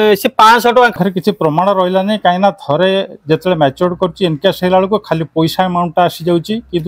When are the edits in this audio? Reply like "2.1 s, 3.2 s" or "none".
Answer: 0.9 s